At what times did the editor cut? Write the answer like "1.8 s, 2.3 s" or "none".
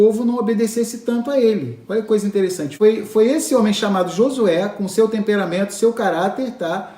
2.6 s